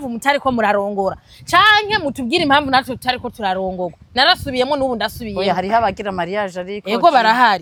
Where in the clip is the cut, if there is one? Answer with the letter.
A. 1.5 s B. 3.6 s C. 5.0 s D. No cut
D